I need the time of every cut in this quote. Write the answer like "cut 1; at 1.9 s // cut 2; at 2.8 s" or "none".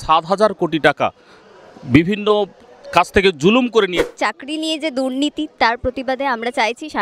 cut 1; at 4.0 s